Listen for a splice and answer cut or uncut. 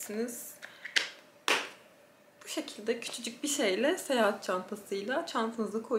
uncut